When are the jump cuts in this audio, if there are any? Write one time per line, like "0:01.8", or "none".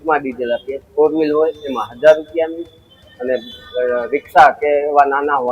none

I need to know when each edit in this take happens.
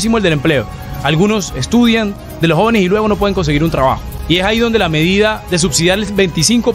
0:04.1

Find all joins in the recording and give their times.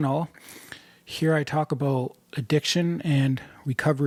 none

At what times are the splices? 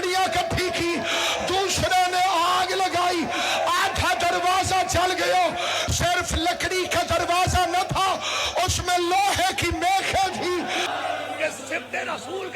0:10.9

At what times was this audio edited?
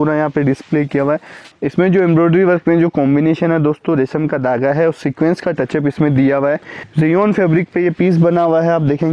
0:01.4
0:06.8

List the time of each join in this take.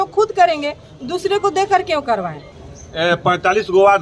0:02.6

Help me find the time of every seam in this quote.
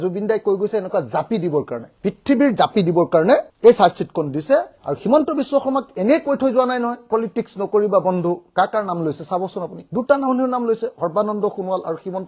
none

